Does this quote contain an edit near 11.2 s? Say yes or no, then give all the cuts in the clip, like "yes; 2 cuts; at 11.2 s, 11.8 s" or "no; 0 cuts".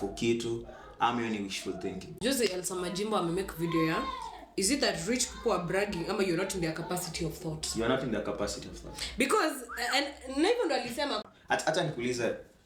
yes; 2 cuts; at 2.1 s, 11.2 s